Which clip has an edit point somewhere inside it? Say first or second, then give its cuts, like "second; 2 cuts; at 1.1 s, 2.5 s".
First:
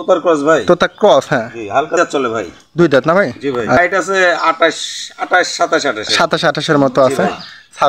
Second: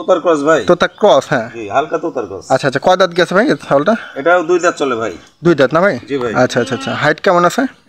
first; 2 cuts; at 2.0 s, 3.8 s